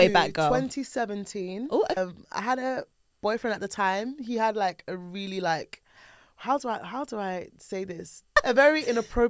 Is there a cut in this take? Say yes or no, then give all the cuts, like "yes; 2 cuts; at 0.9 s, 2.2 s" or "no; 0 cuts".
yes; 2 cuts; at 2.0 s, 8.4 s